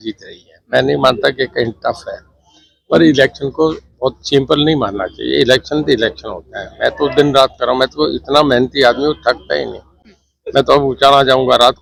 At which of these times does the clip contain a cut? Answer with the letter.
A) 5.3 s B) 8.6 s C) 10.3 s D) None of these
D